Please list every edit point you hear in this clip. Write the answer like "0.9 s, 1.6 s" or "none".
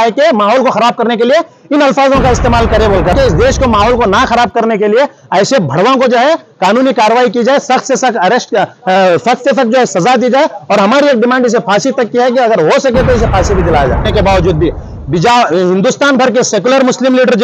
3.1 s, 14.1 s

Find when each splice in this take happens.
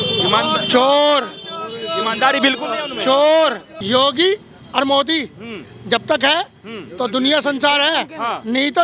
3.7 s

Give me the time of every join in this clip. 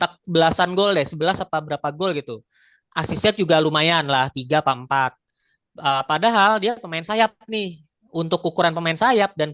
none

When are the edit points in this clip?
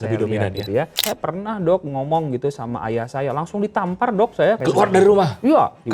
1.0 s, 4.6 s

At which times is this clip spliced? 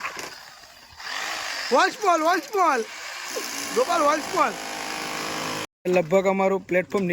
5.7 s

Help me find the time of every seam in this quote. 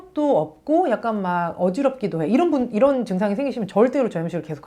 none

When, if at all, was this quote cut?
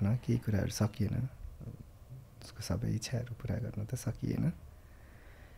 none

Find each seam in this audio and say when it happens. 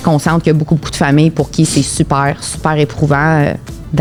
none

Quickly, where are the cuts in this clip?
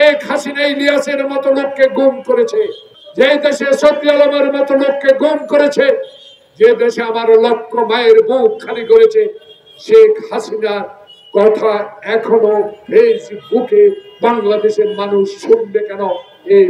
none

